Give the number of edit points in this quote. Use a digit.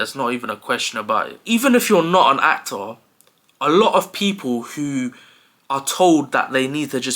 1